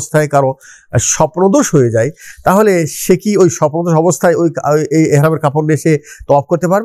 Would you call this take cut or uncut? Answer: uncut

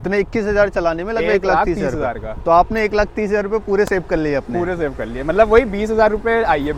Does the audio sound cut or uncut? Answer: uncut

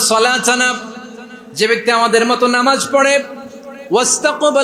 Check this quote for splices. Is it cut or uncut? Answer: uncut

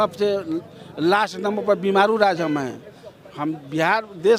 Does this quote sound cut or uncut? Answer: uncut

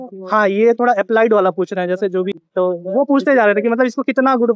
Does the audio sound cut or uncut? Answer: cut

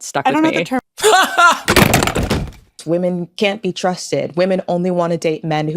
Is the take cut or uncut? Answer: cut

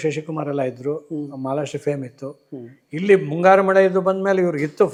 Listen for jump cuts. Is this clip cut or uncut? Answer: uncut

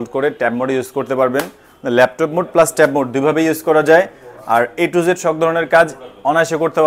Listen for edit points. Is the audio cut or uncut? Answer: uncut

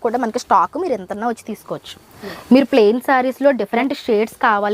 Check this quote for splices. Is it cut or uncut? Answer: cut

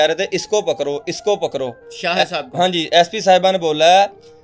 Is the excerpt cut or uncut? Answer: uncut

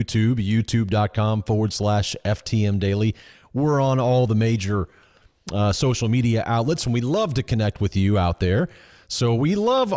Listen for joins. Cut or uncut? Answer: cut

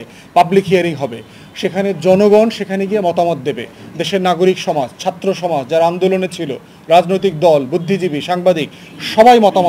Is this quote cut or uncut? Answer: uncut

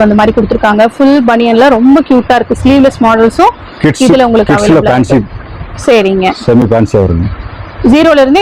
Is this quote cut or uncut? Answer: uncut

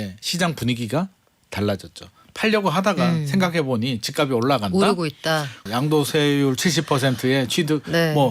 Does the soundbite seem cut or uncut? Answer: cut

